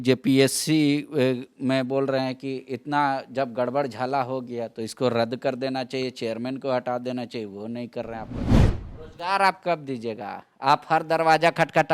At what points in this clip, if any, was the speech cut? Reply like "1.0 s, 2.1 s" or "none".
8.6 s